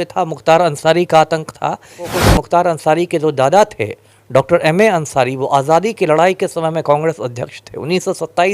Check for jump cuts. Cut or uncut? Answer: cut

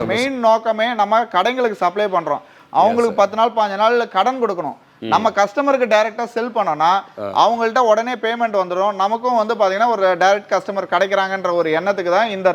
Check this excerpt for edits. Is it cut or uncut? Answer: uncut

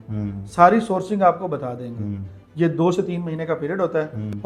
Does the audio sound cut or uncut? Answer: uncut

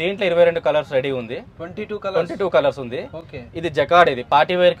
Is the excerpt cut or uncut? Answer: uncut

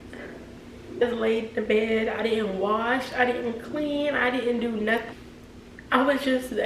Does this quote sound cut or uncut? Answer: cut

